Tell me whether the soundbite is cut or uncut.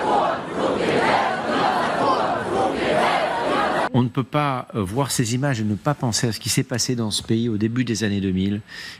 cut